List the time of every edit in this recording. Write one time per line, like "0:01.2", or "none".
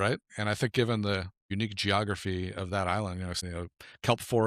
0:01.5
0:03.4